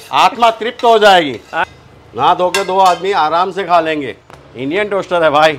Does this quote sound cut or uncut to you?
cut